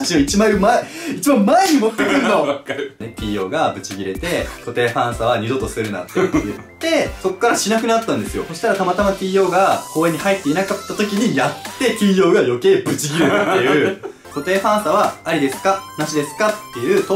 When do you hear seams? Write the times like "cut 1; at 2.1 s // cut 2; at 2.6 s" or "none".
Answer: cut 1; at 3.0 s // cut 2; at 8.4 s // cut 3; at 14.1 s